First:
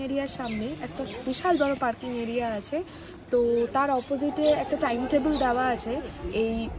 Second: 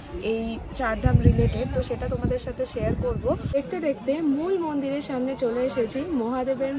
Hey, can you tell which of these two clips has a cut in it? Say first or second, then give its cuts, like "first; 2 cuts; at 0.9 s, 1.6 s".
second; 1 cut; at 3.4 s